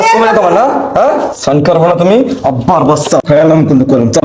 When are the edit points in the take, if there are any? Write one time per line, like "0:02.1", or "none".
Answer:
0:03.2